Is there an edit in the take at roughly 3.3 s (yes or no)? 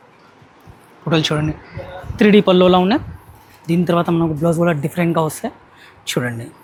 no